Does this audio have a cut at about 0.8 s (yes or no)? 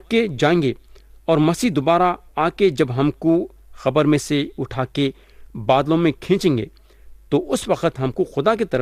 no